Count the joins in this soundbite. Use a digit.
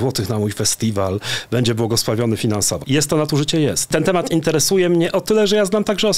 2